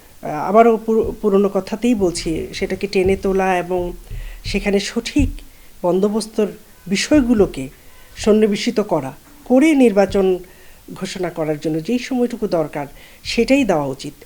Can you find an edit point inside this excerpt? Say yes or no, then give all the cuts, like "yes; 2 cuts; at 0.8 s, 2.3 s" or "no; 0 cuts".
no; 0 cuts